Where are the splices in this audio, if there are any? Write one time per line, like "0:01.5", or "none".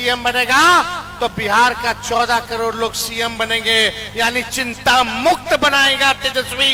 none